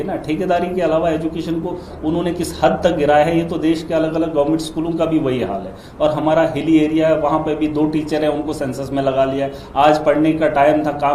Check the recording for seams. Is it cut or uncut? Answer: uncut